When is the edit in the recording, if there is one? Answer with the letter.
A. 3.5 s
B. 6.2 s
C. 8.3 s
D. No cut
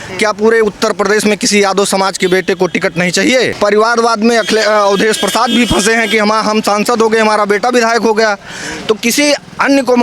A